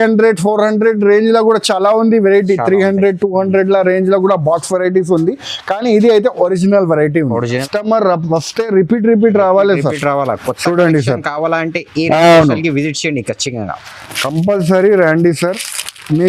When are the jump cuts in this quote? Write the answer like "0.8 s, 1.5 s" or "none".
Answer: 7.6 s